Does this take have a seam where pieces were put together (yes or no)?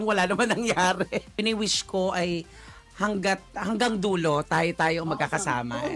yes